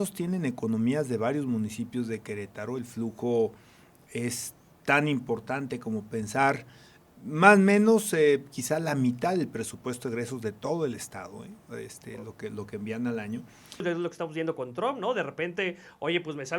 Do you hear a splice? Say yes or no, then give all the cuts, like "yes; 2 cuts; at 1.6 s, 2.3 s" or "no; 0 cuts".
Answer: yes; 1 cut; at 13.8 s